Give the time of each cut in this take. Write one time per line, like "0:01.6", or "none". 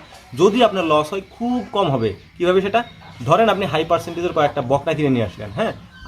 none